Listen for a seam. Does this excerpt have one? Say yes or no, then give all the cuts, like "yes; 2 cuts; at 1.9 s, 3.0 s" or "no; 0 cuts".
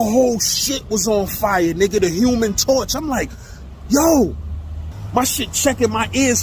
yes; 1 cut; at 4.9 s